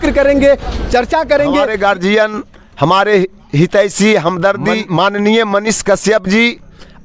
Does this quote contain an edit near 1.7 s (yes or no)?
yes